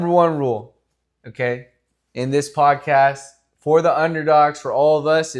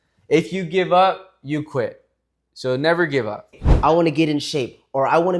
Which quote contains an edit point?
second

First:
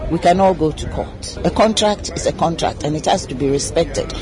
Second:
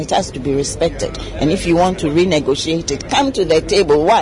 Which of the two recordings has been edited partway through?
first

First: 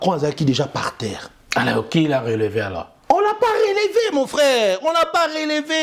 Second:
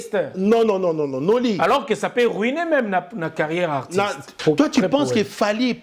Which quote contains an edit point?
second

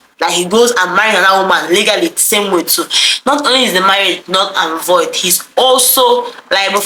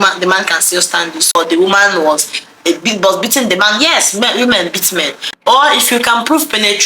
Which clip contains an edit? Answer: second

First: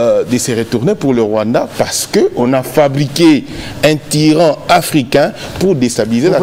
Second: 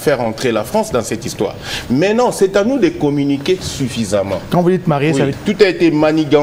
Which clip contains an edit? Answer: second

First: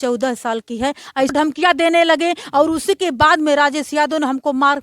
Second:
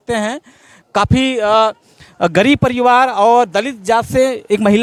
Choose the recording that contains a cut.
first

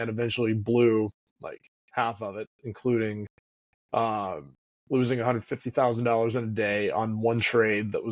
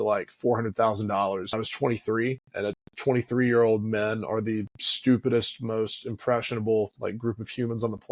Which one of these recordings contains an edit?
second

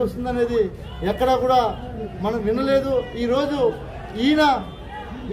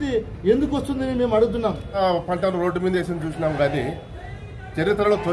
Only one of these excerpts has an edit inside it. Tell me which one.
second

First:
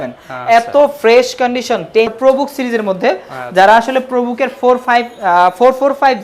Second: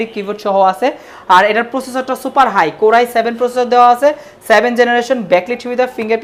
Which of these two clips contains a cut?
first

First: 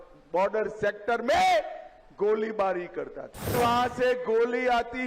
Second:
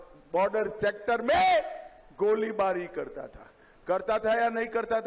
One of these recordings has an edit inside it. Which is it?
first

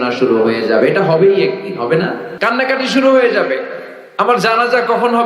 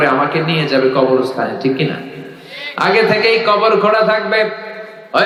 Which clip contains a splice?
first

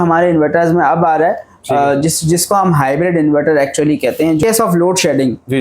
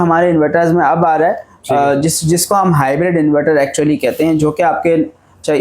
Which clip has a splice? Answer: first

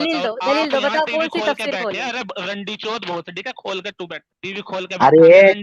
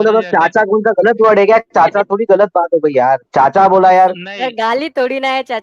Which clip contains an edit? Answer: first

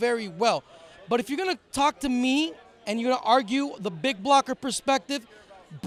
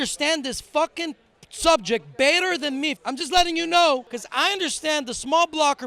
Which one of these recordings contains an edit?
second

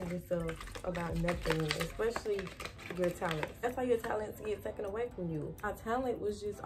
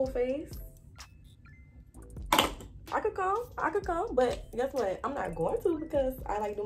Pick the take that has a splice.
first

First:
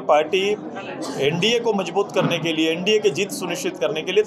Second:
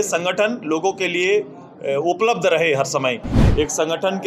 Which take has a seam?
second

